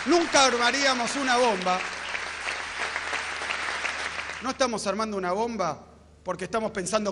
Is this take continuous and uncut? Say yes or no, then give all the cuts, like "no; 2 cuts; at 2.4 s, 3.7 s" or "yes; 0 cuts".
no; 1 cut; at 4.2 s